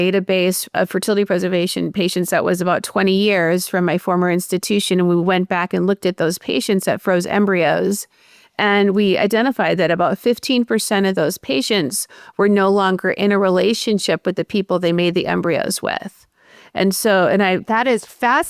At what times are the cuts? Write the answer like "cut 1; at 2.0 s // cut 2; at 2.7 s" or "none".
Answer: none